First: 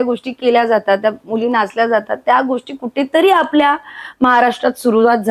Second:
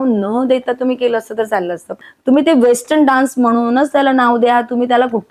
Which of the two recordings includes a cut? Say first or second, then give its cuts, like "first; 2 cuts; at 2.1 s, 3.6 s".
second; 1 cut; at 2.0 s